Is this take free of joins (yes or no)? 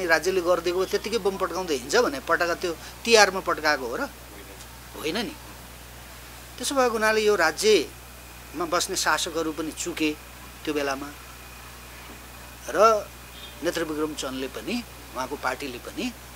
yes